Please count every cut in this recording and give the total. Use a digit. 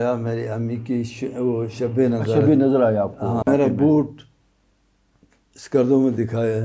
1